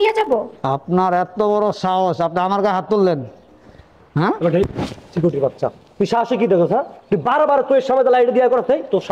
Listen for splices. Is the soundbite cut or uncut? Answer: uncut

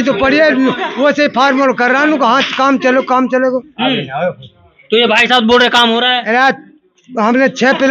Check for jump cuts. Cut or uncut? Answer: uncut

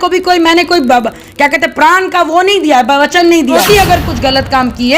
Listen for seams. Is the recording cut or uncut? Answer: cut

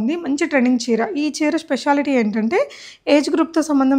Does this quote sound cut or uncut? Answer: uncut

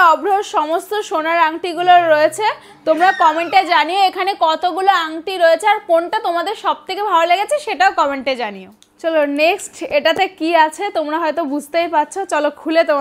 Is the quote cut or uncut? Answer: uncut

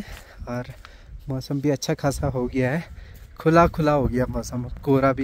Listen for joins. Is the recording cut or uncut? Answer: uncut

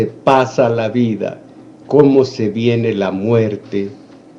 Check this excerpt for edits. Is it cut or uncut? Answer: cut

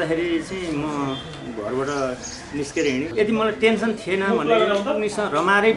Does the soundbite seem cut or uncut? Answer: cut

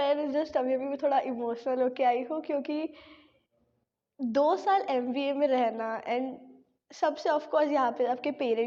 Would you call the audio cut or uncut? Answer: uncut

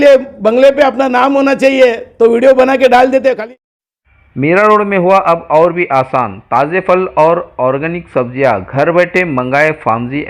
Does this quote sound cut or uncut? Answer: cut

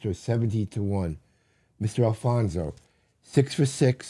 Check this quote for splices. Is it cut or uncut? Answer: uncut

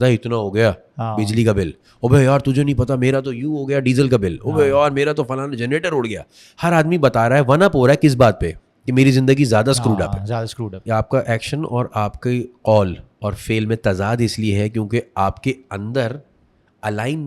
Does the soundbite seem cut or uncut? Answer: cut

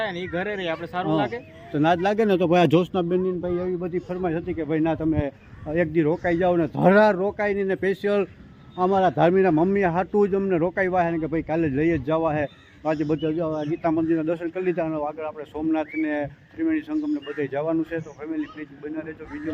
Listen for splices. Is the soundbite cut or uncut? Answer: uncut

